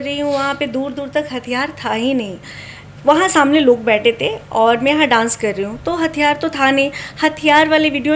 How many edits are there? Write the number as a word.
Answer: zero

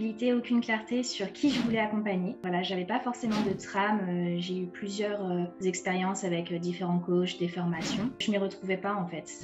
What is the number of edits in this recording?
three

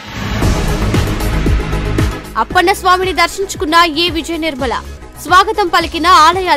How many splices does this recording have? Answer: one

